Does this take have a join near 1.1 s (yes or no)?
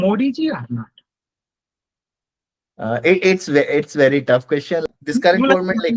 no